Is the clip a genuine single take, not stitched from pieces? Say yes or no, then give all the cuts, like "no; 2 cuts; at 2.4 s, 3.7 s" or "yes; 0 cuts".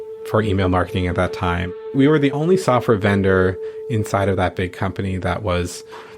no; 1 cut; at 1.7 s